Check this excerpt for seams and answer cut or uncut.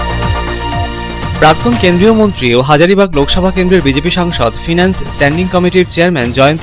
cut